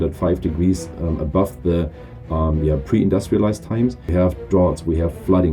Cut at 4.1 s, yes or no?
yes